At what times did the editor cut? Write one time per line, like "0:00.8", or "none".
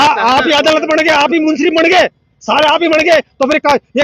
none